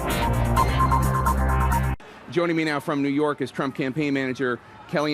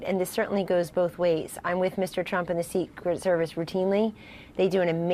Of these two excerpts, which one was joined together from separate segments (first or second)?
first